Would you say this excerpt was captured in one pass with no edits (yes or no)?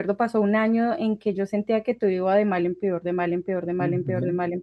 yes